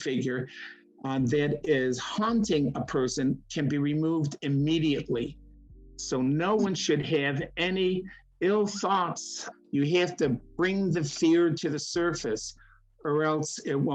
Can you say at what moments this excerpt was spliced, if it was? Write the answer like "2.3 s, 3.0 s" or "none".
9.4 s